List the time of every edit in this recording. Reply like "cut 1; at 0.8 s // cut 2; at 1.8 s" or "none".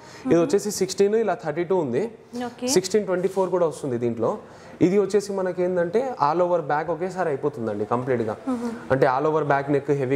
none